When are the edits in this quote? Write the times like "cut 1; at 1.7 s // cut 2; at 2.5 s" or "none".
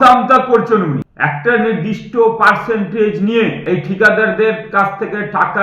cut 1; at 1.1 s // cut 2; at 3.6 s